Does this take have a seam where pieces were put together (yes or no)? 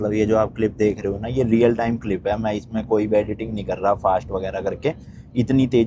no